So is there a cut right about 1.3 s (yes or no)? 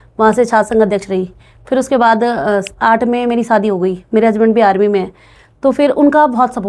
no